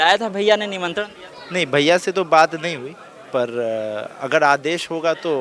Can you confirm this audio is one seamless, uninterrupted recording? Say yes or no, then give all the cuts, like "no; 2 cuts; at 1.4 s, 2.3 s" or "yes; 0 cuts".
yes; 0 cuts